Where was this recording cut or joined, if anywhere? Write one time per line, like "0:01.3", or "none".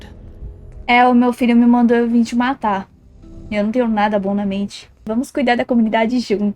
0:05.0